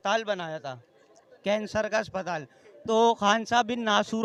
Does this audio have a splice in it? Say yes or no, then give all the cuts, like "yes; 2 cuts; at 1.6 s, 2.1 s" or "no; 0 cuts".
no; 0 cuts